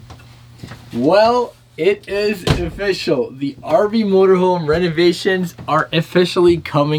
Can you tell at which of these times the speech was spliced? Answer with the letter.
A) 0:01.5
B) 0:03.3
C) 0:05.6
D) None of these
D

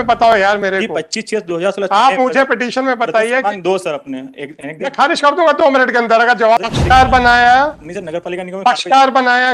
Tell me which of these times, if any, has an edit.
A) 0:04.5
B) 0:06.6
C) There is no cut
B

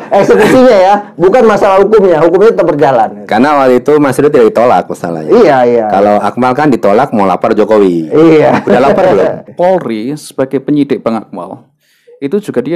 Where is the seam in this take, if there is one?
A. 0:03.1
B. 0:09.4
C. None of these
B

